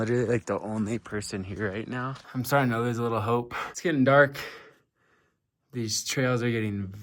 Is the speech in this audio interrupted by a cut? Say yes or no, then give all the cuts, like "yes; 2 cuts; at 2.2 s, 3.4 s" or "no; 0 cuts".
yes; 1 cut; at 2.2 s